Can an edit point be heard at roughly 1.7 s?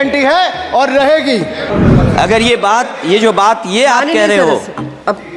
yes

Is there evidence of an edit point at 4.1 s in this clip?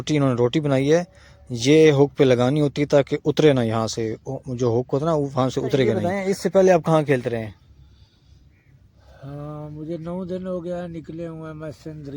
no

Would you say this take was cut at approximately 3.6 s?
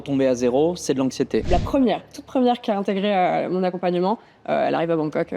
no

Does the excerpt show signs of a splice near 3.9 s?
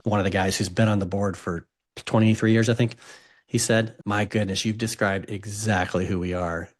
yes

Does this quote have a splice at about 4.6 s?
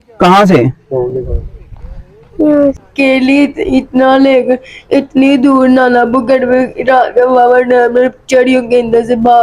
no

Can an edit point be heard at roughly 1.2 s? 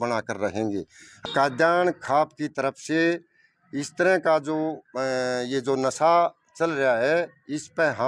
yes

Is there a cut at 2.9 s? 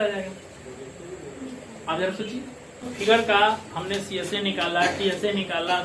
yes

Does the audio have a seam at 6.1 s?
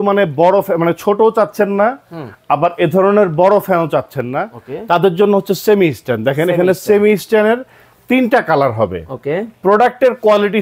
no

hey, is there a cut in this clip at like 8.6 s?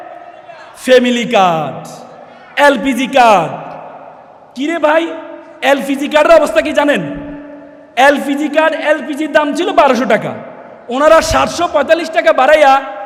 no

